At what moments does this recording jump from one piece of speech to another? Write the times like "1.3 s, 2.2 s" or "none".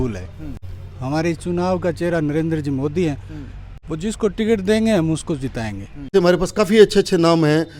6.1 s